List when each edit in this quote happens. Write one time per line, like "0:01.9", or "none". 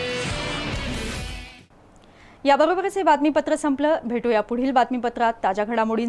none